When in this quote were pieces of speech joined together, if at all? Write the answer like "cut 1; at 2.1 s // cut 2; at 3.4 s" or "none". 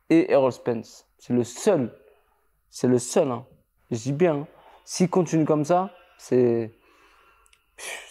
none